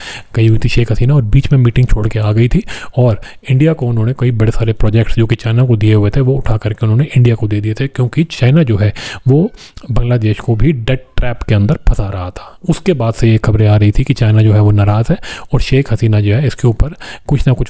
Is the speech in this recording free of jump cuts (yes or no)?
yes